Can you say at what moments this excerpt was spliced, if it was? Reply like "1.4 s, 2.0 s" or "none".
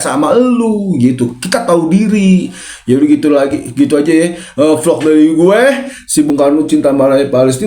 6.3 s